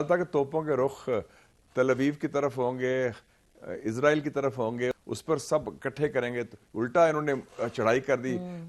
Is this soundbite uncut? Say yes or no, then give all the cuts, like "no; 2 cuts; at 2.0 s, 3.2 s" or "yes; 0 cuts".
yes; 0 cuts